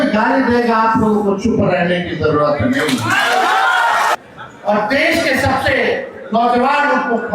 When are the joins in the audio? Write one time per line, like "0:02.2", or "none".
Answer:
0:04.1